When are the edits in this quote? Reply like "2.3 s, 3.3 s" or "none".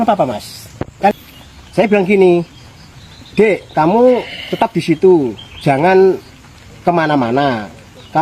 1.1 s

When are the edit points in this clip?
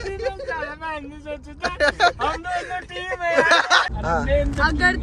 3.9 s

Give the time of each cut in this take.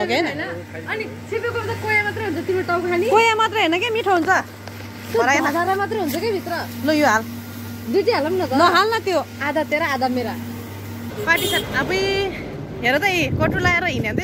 11.0 s

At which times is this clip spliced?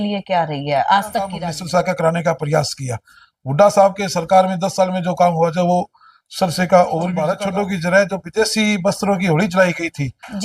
1.4 s, 7.3 s

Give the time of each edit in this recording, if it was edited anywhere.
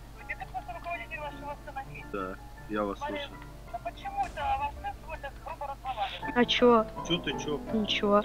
2.0 s, 3.7 s, 6.2 s

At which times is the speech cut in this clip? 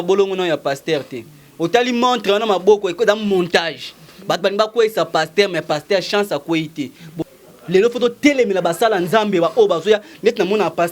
7.0 s

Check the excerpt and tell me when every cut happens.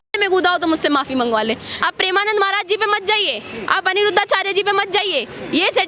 1.7 s

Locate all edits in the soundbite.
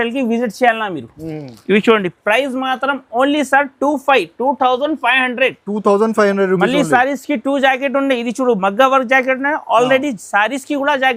none

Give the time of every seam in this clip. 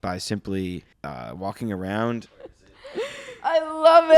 0.9 s, 2.3 s

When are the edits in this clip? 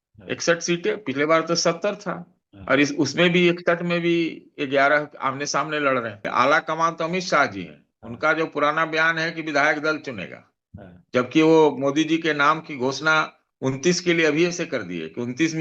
6.3 s

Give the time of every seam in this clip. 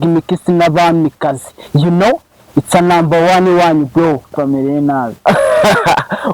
4.3 s

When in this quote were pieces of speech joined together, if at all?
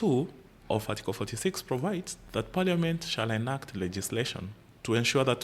2.2 s

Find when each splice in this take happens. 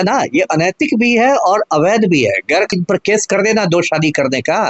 2.7 s

